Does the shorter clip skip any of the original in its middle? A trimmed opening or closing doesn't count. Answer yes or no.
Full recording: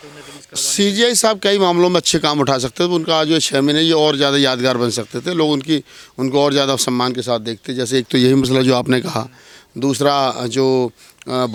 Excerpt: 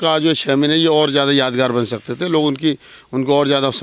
no